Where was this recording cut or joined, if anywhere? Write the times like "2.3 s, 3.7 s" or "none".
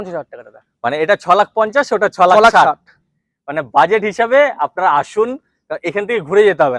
none